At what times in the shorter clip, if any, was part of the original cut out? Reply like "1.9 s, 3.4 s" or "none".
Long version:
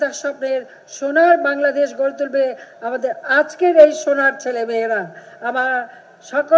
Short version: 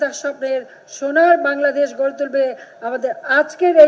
none